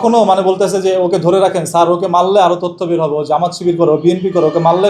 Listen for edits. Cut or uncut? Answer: uncut